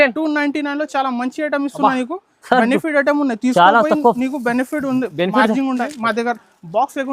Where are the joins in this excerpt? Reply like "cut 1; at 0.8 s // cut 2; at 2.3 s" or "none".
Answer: cut 1; at 5.9 s